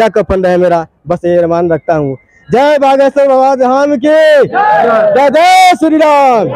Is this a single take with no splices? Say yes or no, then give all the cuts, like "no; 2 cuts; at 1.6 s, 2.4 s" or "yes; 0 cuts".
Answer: yes; 0 cuts